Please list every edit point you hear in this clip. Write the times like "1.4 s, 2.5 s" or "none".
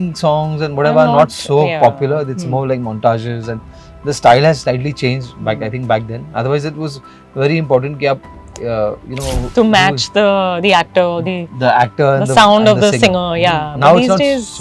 none